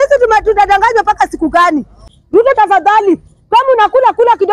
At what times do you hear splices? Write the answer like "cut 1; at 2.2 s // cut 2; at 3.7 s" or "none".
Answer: cut 1; at 2.1 s